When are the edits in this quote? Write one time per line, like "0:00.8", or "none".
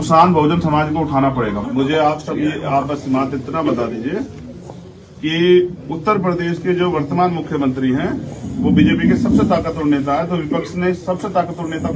0:01.6